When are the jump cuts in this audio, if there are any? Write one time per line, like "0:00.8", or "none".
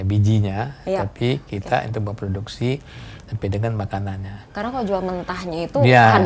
0:04.4